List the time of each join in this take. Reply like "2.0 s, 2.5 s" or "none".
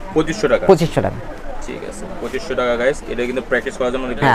none